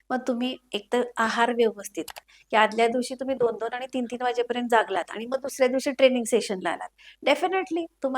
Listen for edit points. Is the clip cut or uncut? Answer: cut